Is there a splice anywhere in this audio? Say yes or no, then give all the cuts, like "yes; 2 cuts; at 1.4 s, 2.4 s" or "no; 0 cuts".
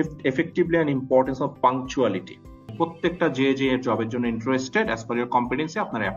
yes; 1 cut; at 2.7 s